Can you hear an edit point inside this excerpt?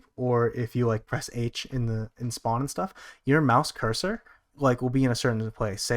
no; 0 cuts

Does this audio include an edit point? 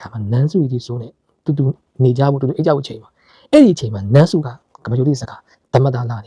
no; 0 cuts

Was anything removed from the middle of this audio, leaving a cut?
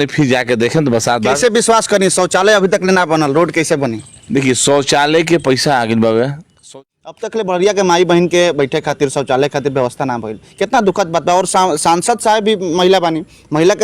yes; 1 cut; at 6.6 s

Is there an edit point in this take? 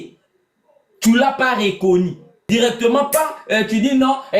yes; 1 cut; at 2.5 s

